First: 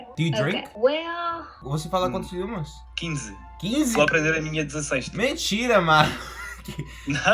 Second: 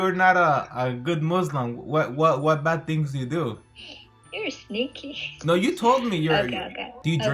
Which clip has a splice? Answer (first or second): first